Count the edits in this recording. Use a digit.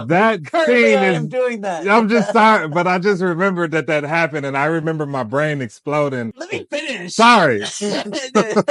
1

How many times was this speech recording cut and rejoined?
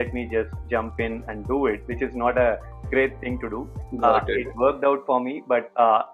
0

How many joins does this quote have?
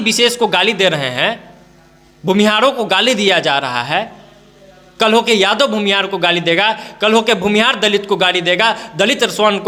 0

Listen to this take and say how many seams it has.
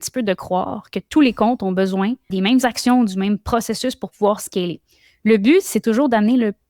1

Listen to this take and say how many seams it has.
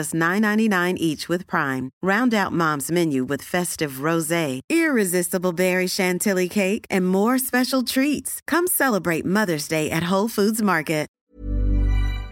1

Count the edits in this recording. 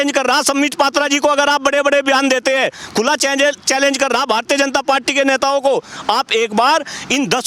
0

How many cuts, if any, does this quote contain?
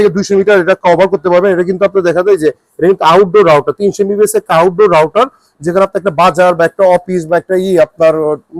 0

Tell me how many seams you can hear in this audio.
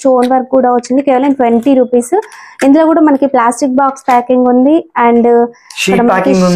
0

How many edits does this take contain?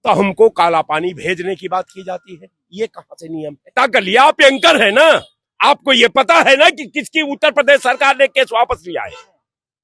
1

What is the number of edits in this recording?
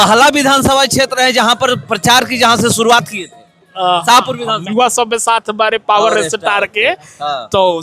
1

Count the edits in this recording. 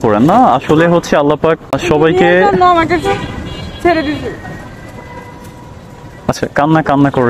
1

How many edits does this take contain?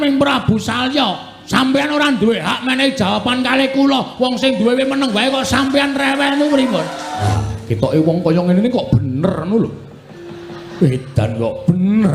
2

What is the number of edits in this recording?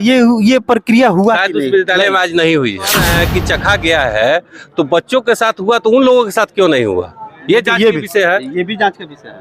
1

